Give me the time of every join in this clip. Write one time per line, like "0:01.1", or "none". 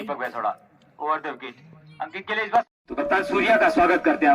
0:02.7